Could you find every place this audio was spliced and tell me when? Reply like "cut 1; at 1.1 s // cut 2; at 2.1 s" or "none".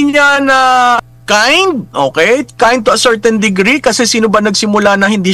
cut 1; at 1.0 s